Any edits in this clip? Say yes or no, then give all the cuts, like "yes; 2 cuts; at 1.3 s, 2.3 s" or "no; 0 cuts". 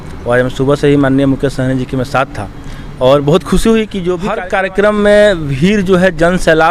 yes; 1 cut; at 4.3 s